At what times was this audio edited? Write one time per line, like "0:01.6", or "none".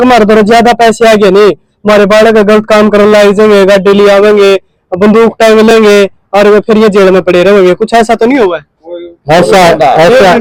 none